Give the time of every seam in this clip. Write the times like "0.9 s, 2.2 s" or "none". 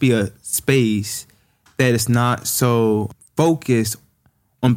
3.1 s